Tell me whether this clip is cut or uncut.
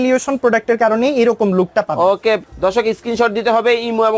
cut